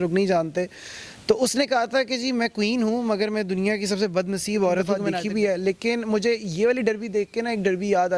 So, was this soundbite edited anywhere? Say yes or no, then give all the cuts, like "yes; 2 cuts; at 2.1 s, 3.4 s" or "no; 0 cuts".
yes; 1 cut; at 5.0 s